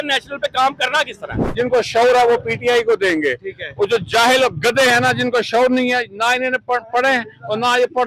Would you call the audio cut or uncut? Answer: cut